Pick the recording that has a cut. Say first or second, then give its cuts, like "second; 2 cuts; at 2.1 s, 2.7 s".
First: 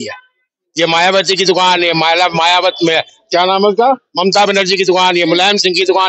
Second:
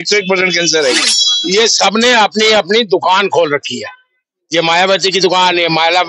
second; 1 cut; at 1.3 s